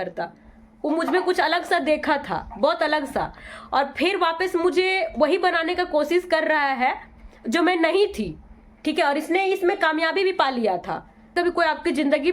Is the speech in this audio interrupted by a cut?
yes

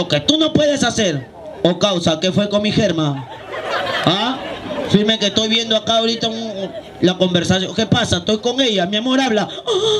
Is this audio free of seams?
yes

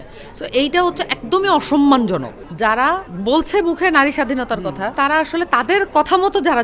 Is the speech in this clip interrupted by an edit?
yes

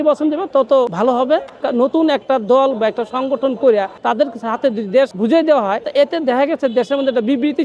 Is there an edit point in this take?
yes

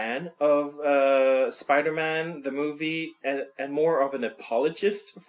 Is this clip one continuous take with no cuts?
no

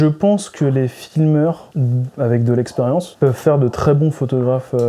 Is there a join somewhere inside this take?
yes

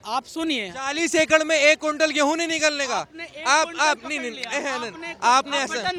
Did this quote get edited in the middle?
no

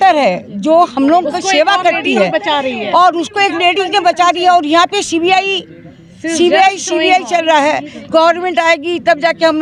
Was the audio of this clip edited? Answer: no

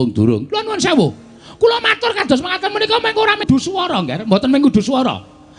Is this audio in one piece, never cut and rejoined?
no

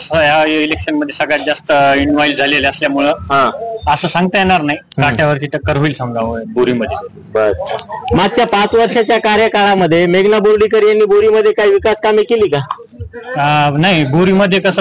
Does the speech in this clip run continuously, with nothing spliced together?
yes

